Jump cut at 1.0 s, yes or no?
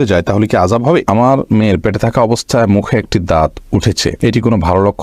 yes